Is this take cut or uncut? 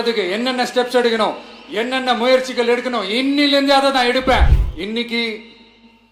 cut